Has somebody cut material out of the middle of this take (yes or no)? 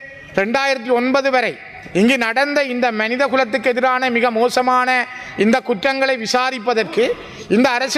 no